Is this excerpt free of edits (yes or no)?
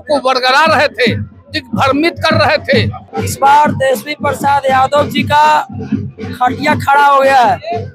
no